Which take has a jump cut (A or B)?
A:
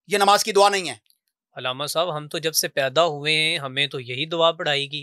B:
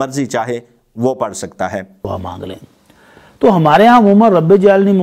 B